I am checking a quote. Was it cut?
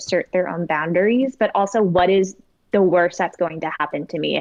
no; 0 cuts

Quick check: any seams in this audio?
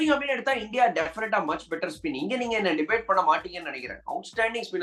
no; 0 cuts

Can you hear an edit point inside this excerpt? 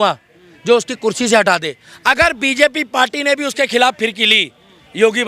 no; 0 cuts

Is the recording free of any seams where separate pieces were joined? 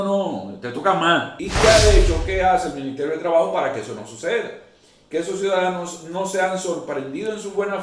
no; 1 cut; at 1.4 s

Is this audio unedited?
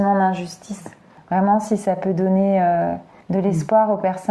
no; 1 cut; at 1.1 s

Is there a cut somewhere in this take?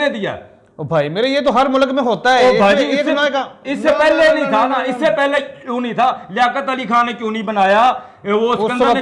no; 0 cuts

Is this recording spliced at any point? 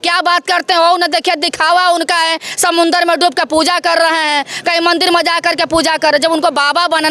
no; 0 cuts

